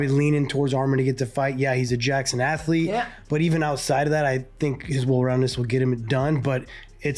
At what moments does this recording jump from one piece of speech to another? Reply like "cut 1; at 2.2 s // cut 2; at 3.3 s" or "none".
none